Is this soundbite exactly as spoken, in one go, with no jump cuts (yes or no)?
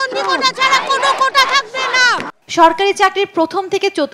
yes